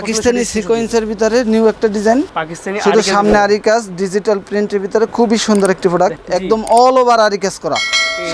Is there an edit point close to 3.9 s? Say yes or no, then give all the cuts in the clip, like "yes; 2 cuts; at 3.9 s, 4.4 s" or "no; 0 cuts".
no; 2 cuts; at 2.4 s, 6.2 s